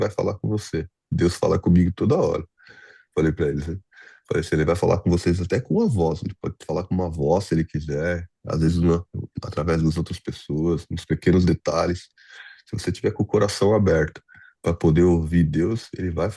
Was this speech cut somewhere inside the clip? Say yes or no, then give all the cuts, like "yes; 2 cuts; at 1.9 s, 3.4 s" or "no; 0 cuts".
no; 0 cuts